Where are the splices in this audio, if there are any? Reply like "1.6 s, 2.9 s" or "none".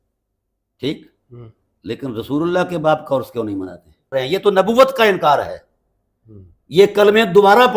4.1 s